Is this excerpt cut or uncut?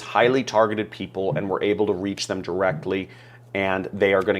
uncut